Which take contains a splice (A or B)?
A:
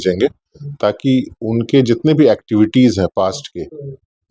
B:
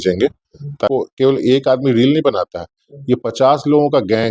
B